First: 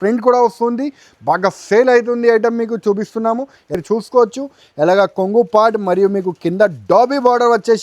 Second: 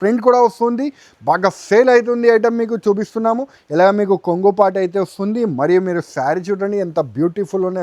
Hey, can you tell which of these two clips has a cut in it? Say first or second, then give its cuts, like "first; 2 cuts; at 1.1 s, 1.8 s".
first; 1 cut; at 3.7 s